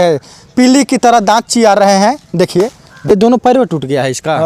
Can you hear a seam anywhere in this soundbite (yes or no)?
yes